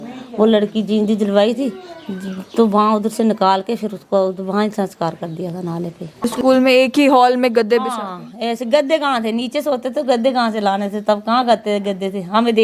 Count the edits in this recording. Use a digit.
1